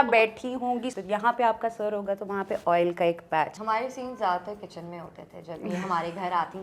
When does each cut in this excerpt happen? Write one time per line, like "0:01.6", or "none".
0:00.9
0:03.6